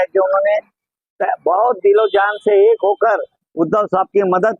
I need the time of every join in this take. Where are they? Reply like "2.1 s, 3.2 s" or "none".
none

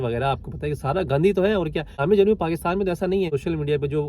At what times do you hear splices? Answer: 2.0 s, 3.3 s

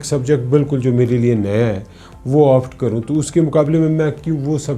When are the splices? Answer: none

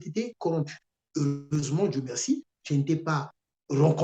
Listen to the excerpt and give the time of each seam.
1.4 s

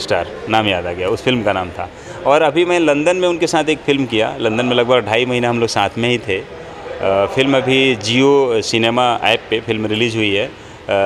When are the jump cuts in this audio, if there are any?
none

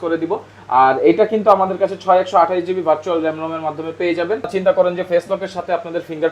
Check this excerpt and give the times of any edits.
4.5 s

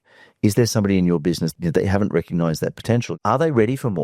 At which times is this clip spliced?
1.5 s, 3.1 s

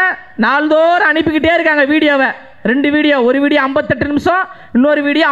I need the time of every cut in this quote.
none

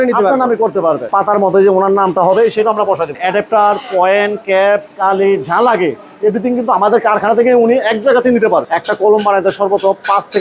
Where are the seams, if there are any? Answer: 1.1 s, 3.2 s, 8.7 s

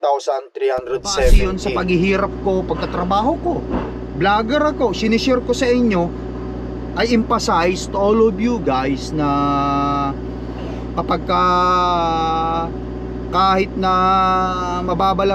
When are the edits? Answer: 1.5 s

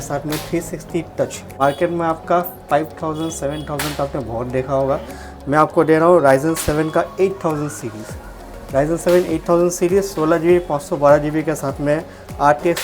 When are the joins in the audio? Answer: 1.4 s

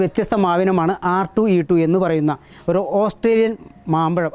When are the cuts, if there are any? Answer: none

